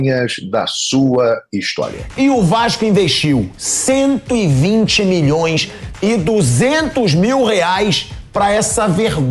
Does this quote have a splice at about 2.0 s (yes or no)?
yes